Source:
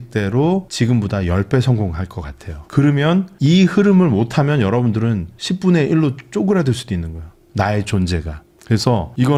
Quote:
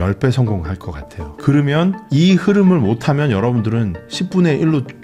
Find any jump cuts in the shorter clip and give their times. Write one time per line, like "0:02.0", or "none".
none